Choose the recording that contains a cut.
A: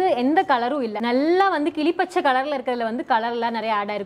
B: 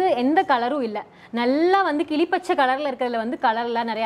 A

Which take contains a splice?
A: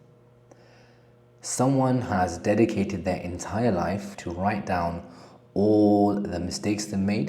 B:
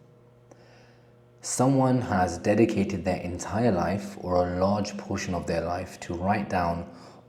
A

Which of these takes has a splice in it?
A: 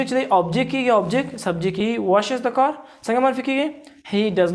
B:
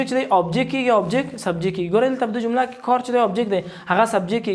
A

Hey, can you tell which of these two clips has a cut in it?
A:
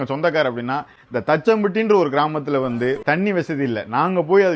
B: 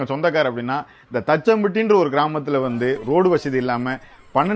A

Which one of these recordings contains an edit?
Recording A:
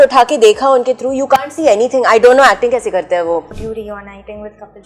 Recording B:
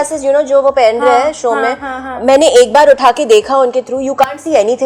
A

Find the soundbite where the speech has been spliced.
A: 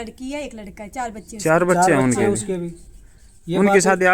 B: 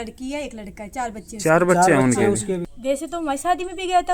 B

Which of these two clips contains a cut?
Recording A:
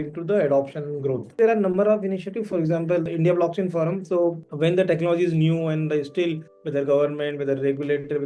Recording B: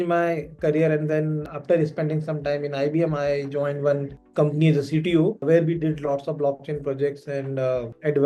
A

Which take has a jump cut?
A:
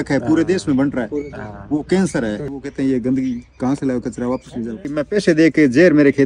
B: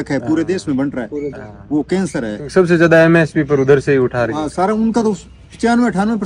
A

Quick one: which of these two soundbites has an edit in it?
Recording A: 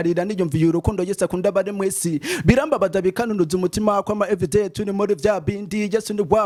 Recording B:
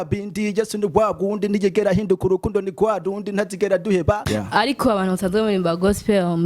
B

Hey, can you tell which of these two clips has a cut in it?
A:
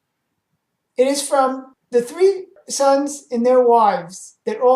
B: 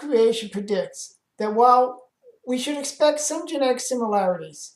A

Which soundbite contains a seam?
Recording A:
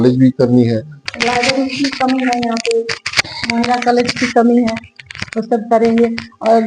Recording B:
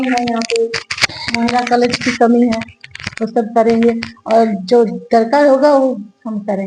A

